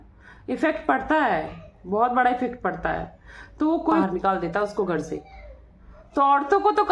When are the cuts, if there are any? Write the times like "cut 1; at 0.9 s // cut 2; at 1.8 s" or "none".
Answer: cut 1; at 4.0 s